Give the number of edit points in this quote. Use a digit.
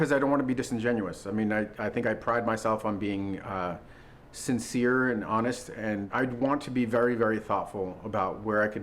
1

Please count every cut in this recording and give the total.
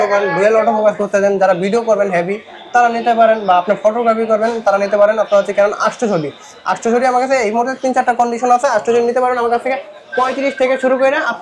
0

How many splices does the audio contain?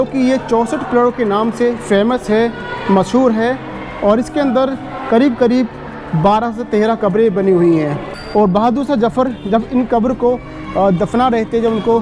1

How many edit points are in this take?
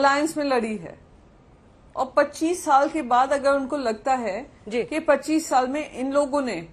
0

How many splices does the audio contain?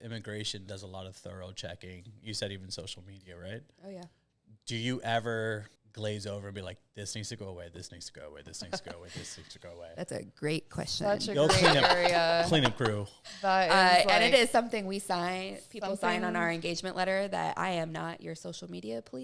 1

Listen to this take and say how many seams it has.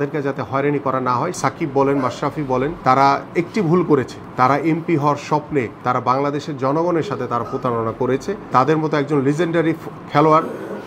5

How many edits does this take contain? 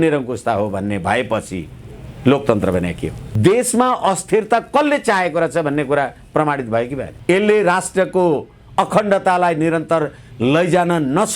2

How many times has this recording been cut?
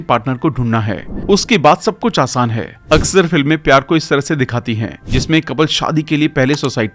0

